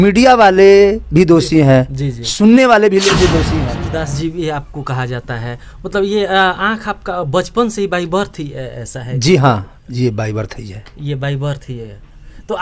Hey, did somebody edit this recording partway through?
yes; 1 cut; at 3.5 s

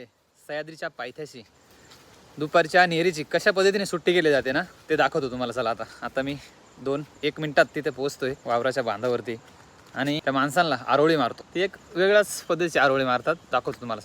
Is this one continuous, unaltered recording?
no; 4 cuts; at 6.0 s, 8.4 s, 10.2 s, 11.4 s

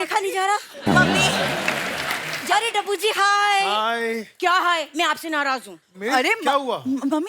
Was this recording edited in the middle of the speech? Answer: yes; 1 cut; at 2.3 s

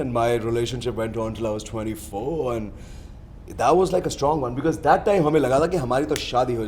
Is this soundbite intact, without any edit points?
yes; 0 cuts

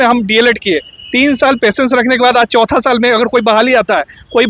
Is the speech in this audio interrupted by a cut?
no; 0 cuts

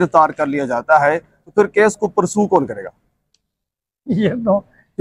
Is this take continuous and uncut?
yes; 0 cuts

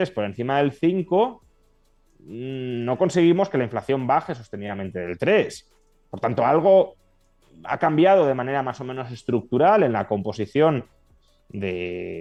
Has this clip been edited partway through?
no; 0 cuts

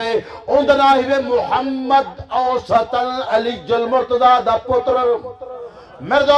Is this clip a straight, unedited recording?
yes; 0 cuts

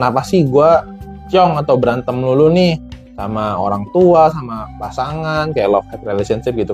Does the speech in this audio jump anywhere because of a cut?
no; 0 cuts

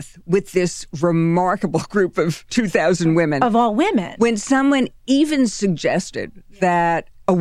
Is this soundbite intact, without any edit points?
yes; 0 cuts

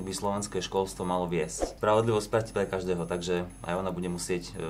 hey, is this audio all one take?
no; 1 cut; at 1.7 s

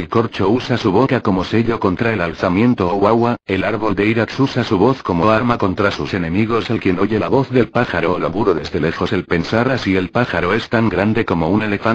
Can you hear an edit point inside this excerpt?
no; 0 cuts

